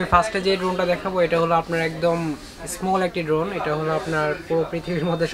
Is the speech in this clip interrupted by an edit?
no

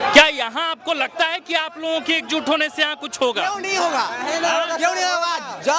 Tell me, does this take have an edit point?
no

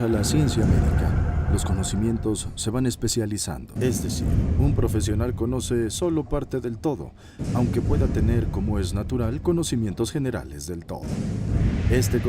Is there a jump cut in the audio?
yes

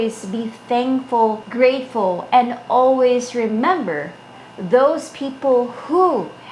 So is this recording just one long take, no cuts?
yes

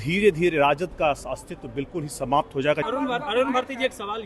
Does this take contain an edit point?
yes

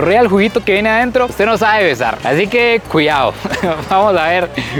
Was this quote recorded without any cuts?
yes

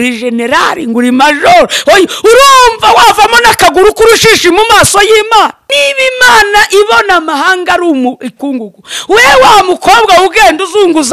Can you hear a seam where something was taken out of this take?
yes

